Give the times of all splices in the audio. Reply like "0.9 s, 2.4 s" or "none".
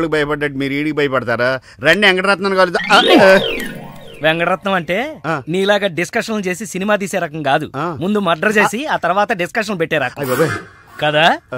none